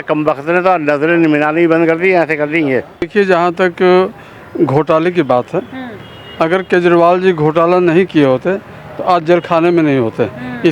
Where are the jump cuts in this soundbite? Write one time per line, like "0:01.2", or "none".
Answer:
0:03.1